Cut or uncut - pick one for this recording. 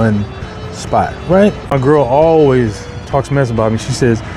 cut